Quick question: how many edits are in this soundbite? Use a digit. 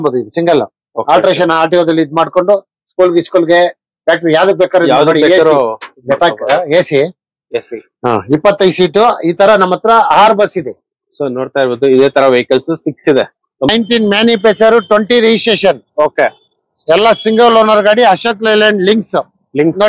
1